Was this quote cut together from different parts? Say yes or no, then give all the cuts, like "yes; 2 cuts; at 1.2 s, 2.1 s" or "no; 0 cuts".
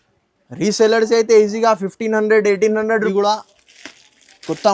yes; 1 cut; at 3.1 s